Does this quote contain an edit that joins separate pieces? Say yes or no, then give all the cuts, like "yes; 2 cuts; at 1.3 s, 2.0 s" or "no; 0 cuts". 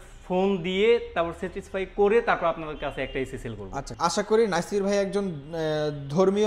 yes; 1 cut; at 3.9 s